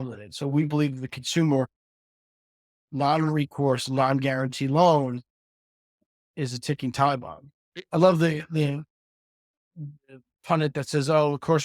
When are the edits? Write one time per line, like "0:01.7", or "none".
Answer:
0:07.7